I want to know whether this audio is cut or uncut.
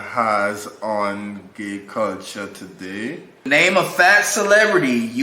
cut